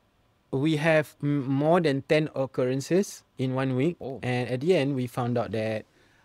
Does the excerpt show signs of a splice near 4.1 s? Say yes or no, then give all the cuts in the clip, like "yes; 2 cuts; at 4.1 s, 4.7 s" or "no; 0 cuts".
yes; 1 cut; at 4.1 s